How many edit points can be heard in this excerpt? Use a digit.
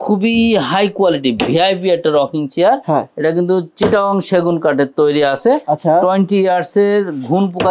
0